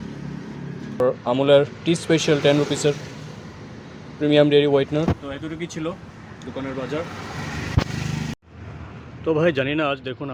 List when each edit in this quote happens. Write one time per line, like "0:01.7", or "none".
none